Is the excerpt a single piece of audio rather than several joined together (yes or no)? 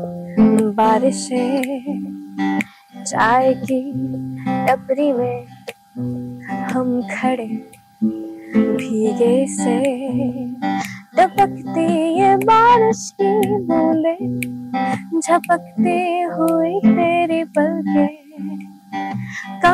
yes